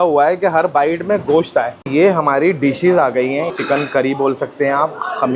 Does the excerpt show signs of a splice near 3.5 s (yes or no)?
yes